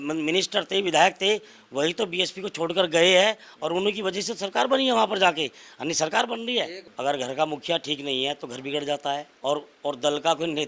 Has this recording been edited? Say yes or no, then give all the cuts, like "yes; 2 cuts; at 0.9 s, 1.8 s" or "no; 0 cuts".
yes; 2 cuts; at 6.8 s, 9.3 s